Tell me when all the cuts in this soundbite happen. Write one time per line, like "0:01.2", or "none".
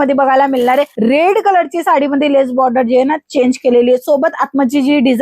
0:00.9